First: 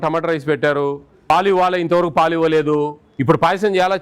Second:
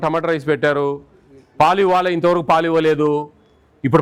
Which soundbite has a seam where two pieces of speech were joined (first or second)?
first